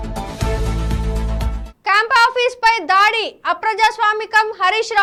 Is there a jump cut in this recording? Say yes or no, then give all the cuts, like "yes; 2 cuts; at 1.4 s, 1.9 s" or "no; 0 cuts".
no; 0 cuts